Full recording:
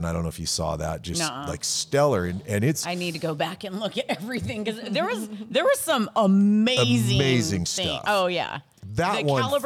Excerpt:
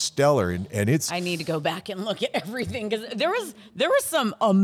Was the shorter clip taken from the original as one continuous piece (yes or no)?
yes